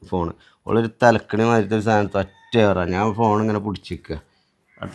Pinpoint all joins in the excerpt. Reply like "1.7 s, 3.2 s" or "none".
none